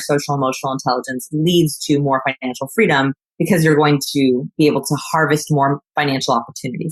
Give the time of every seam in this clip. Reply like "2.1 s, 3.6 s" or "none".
3.2 s, 4.5 s